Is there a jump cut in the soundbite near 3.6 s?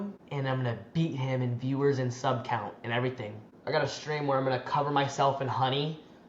yes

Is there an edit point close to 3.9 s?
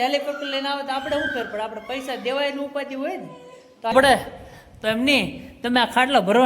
yes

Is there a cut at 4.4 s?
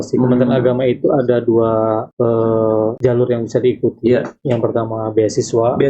no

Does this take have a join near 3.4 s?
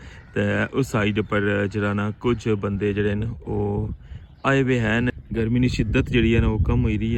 no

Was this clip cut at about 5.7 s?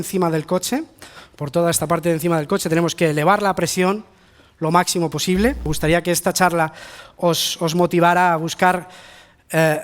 yes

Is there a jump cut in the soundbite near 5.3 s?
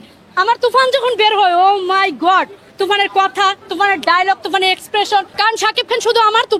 yes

